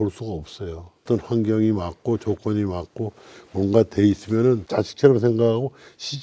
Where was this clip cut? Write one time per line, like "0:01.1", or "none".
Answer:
0:01.0